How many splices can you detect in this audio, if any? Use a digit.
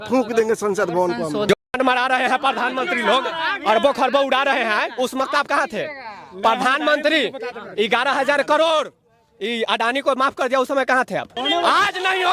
2